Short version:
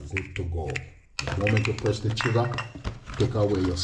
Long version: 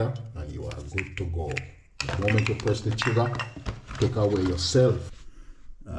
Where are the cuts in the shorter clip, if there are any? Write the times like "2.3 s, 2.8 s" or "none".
none